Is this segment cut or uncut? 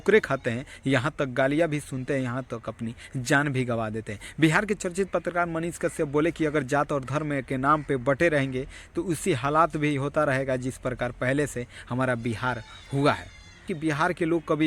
cut